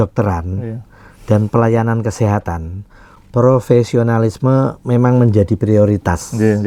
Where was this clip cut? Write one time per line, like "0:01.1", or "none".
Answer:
none